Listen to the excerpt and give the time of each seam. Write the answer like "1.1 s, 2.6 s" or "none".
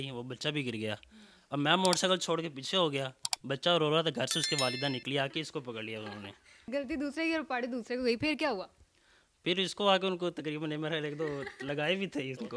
none